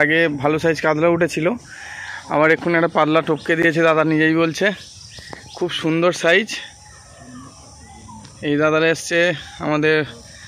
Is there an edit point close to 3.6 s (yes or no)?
no